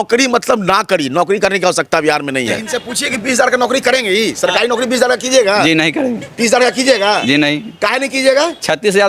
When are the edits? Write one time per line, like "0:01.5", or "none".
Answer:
0:02.6

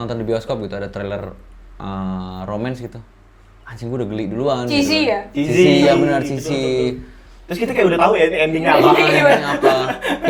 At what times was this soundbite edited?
none

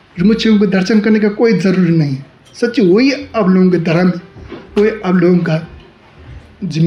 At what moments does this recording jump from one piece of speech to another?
none

